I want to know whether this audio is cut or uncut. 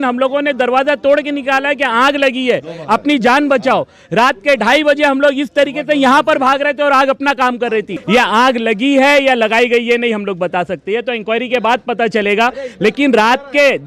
uncut